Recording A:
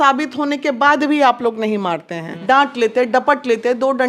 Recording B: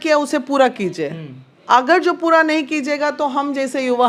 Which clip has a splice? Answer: A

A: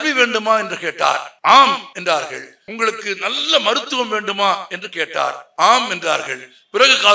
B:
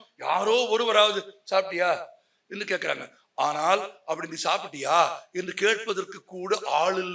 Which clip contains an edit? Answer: A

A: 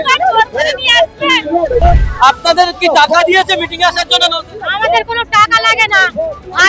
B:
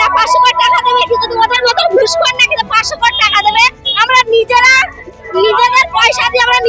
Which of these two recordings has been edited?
A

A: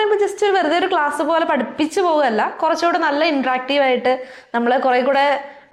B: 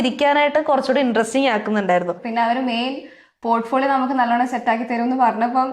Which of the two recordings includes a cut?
B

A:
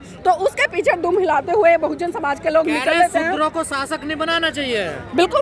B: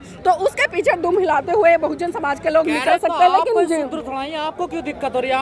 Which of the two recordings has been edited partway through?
B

